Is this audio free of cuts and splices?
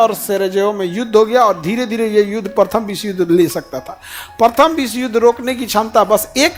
yes; 0 cuts

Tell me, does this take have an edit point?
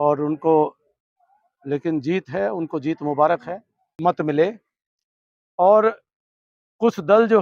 yes; 1 cut; at 3.9 s

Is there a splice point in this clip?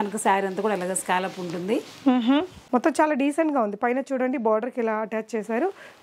yes; 1 cut; at 2.6 s

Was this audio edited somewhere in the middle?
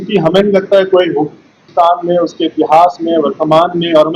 yes; 1 cut; at 1.6 s

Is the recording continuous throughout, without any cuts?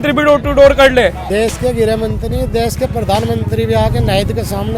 no; 1 cut; at 1.2 s

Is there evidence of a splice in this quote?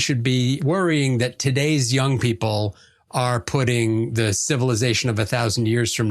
no; 0 cuts

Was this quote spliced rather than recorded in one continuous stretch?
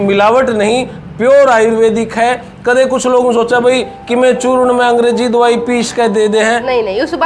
no; 0 cuts

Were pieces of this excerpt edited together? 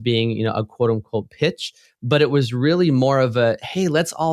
no; 0 cuts

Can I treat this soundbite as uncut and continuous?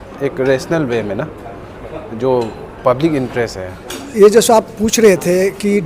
no; 1 cut; at 4.0 s

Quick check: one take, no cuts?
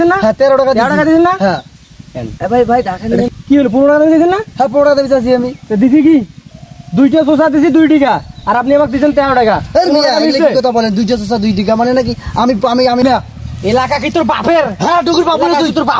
no; 1 cut; at 13.0 s

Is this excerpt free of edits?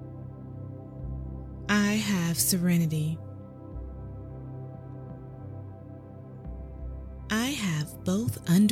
no; 3 cuts; at 1.7 s, 3.2 s, 6.6 s

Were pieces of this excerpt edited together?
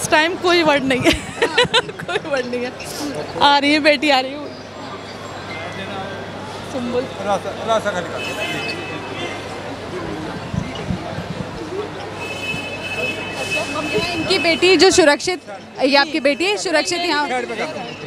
no; 0 cuts

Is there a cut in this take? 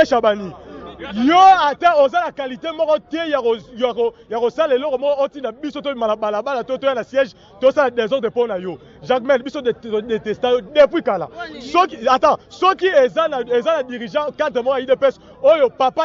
no; 0 cuts

